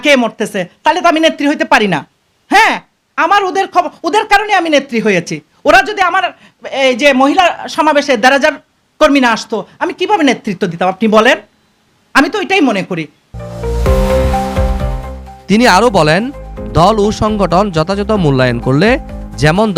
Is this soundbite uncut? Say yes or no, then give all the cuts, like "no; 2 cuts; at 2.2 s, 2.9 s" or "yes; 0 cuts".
yes; 0 cuts